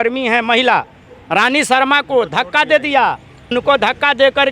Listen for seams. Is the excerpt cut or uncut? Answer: cut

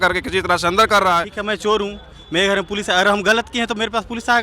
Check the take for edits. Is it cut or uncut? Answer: cut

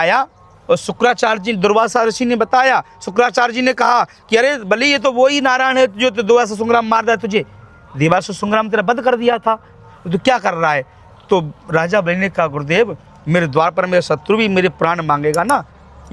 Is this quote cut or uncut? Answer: uncut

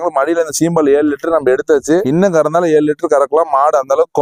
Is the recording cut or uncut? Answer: uncut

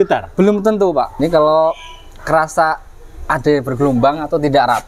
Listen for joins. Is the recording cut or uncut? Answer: cut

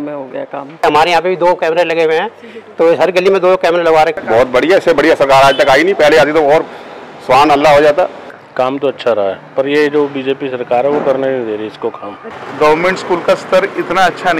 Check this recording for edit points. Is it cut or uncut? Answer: cut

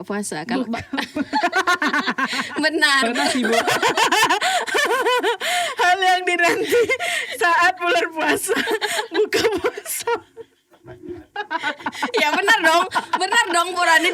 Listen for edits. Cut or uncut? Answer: uncut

